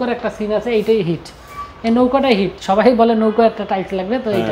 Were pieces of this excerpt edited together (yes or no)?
no